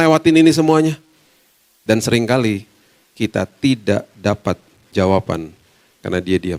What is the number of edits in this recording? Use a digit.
1